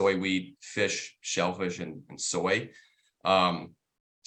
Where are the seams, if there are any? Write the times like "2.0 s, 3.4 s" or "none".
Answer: none